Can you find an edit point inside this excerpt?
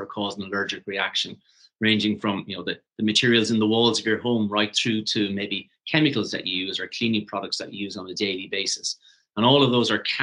no; 0 cuts

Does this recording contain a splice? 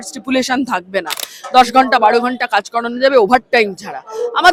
no; 0 cuts

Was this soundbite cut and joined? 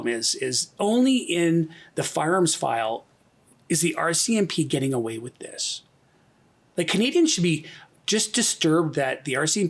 no; 0 cuts

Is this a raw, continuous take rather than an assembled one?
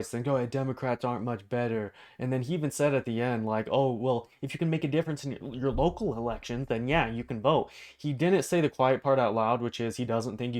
yes; 0 cuts

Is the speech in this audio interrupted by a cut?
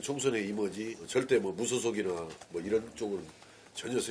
yes; 1 cut; at 1.0 s

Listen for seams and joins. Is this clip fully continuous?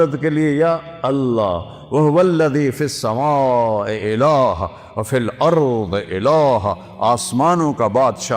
yes; 0 cuts

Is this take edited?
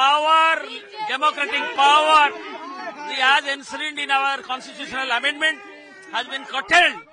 no; 0 cuts

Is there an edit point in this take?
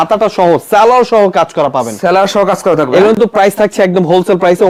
no; 0 cuts

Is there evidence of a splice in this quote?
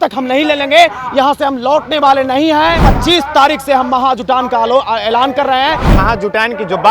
yes; 2 cuts; at 2.9 s, 5.9 s

